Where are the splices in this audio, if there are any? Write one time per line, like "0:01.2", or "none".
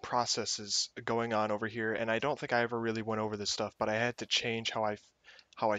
0:03.8